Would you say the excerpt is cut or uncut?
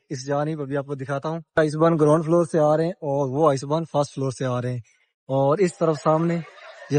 uncut